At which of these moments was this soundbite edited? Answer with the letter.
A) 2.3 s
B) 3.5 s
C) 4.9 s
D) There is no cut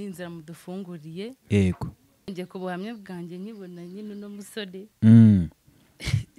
A